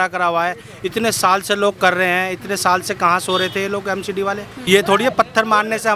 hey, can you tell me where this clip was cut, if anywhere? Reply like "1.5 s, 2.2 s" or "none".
4.5 s